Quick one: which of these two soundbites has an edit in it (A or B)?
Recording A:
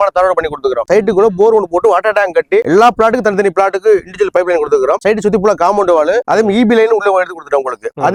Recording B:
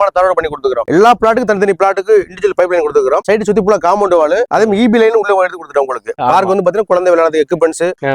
B